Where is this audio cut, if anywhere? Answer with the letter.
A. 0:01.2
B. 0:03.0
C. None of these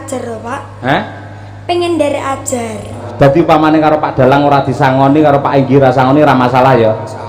B